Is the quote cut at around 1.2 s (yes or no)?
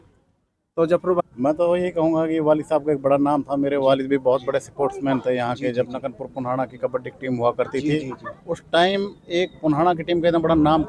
yes